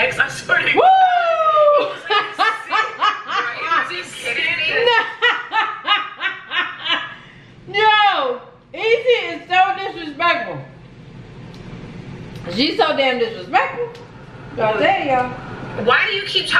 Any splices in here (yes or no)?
no